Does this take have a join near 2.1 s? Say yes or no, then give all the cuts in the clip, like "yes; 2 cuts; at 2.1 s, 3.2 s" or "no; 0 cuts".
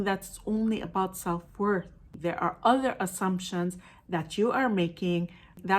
yes; 1 cut; at 2.1 s